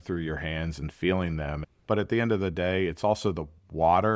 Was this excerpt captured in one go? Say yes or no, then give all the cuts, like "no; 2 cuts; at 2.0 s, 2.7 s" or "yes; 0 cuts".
no; 1 cut; at 1.8 s